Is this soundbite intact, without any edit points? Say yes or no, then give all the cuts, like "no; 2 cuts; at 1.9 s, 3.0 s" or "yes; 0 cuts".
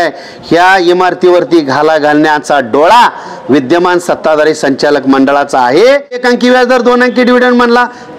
no; 1 cut; at 6.2 s